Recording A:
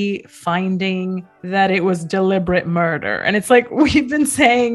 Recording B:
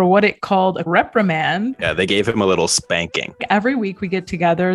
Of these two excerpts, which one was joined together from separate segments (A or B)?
B